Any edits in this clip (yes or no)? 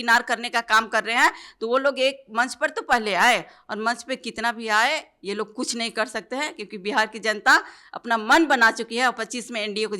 no